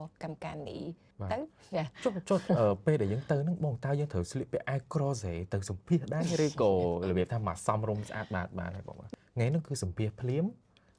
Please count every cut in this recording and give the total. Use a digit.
2